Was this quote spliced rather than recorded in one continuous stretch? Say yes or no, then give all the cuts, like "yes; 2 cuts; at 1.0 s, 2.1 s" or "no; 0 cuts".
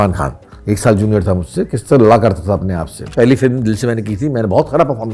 yes; 1 cut; at 3.1 s